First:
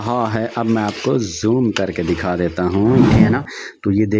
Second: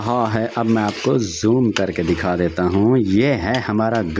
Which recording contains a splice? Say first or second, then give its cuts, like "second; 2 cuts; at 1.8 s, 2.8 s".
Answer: first; 1 cut; at 3.1 s